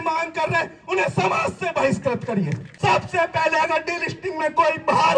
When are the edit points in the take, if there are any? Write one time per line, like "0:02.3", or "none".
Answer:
0:02.6